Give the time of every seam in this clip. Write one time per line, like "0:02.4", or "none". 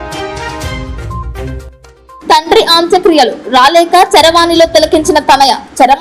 none